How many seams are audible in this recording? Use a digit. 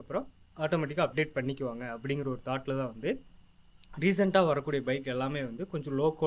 0